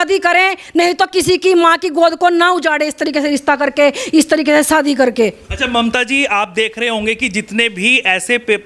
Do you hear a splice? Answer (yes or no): no